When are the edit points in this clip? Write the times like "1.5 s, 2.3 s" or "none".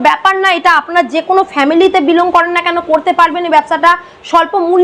none